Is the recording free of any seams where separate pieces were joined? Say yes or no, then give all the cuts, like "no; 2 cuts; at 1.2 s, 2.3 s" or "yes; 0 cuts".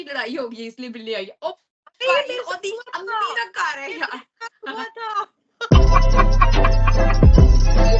yes; 0 cuts